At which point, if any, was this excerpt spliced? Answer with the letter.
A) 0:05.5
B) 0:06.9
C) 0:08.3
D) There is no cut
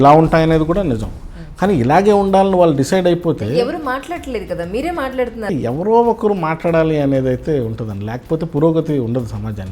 A